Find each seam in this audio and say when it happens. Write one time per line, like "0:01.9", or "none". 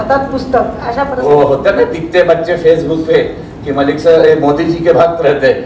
0:01.2